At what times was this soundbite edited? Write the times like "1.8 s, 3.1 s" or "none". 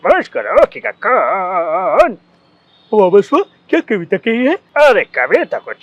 4.7 s